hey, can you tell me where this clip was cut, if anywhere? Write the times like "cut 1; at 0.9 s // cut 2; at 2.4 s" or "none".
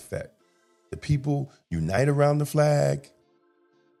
none